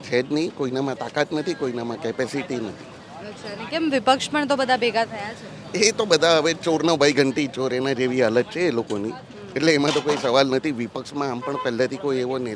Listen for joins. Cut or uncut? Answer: uncut